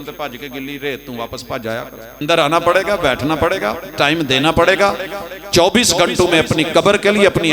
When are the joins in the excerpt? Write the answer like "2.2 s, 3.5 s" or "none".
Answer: 2.2 s